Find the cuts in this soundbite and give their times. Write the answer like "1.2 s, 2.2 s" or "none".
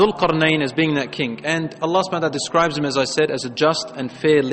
none